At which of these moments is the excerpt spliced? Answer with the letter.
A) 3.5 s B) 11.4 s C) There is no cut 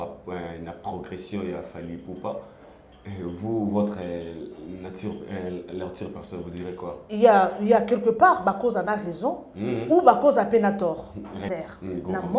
B